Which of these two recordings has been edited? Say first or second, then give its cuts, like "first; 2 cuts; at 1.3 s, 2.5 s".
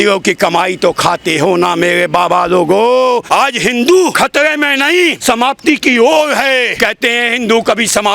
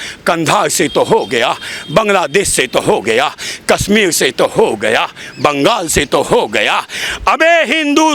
first; 4 cuts; at 3.2 s, 4.1 s, 5.2 s, 6.7 s